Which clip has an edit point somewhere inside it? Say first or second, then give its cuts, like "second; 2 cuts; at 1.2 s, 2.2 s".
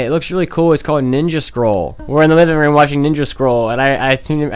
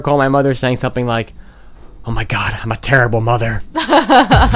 first; 1 cut; at 1.9 s